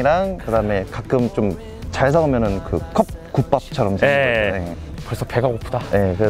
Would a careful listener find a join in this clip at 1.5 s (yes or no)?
no